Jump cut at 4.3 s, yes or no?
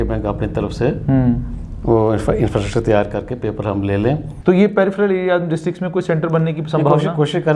yes